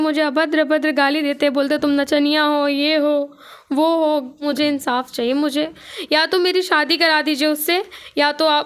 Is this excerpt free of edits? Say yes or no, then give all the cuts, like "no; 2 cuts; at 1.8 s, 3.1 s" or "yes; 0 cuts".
no; 1 cut; at 4.3 s